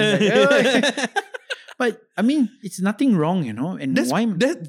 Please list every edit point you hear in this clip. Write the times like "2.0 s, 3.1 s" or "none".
2.6 s